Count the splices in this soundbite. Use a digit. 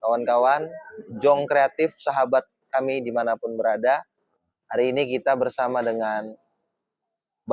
0